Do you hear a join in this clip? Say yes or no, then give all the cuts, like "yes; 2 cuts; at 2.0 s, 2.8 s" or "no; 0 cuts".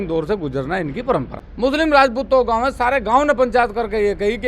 yes; 1 cut; at 1.4 s